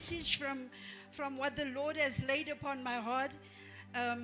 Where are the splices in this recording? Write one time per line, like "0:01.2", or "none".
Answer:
none